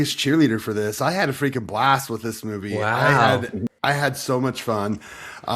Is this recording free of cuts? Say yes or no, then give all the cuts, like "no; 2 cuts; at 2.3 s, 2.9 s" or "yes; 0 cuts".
yes; 0 cuts